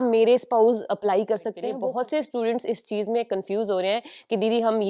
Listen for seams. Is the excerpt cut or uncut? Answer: cut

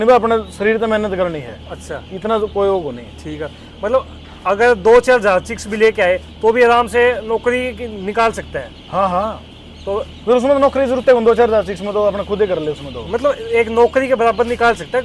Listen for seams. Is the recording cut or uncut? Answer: uncut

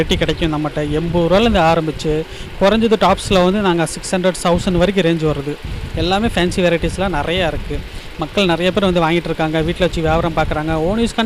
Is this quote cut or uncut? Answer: uncut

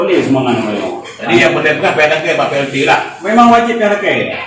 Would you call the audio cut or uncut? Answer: uncut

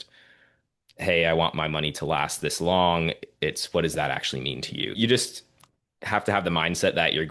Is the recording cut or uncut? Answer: cut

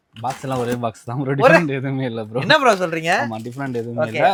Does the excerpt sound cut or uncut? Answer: uncut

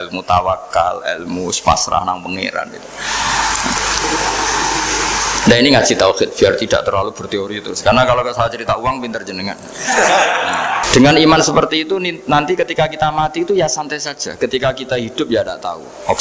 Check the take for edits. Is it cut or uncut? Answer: cut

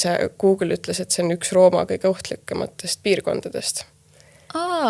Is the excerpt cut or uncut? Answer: uncut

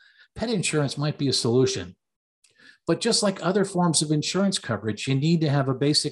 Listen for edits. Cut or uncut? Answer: uncut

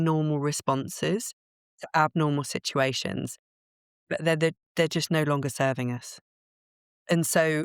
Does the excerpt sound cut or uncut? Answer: uncut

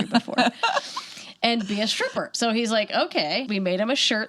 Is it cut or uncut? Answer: cut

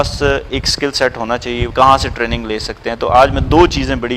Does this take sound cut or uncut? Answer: cut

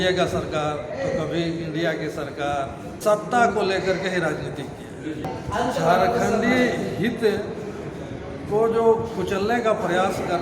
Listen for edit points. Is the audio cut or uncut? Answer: cut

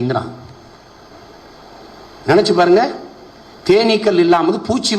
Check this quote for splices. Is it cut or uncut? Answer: cut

